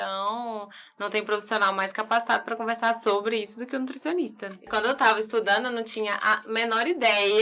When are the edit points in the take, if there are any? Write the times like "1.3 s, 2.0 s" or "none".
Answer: 4.7 s